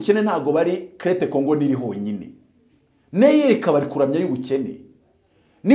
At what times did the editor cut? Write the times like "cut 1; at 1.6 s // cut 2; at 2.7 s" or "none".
none